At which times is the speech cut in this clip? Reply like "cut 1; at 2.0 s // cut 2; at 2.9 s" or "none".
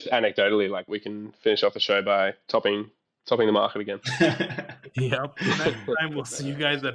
cut 1; at 0.9 s